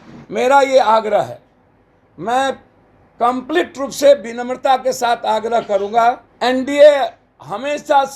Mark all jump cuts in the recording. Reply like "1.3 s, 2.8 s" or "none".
6.3 s